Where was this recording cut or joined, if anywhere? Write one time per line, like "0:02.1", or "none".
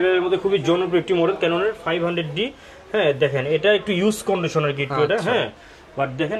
none